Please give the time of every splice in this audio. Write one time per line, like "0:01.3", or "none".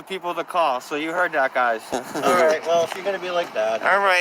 0:01.9